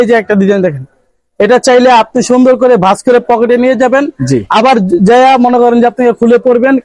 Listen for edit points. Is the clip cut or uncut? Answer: uncut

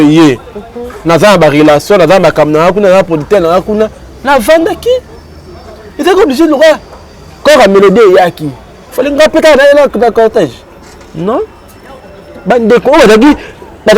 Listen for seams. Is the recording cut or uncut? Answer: uncut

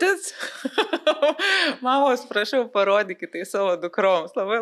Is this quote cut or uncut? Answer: uncut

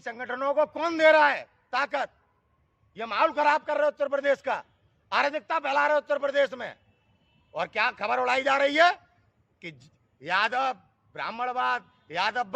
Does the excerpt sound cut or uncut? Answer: uncut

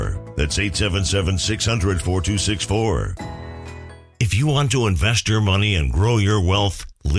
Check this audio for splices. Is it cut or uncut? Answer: cut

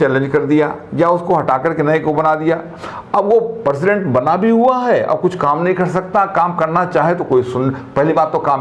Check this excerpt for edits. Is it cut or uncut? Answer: uncut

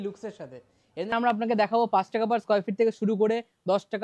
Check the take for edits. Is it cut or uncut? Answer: cut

